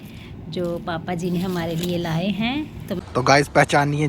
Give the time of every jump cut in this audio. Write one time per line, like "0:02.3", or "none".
0:03.0